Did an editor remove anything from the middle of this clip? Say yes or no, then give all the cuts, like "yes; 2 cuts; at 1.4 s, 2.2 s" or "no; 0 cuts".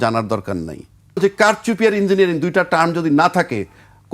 yes; 1 cut; at 1.2 s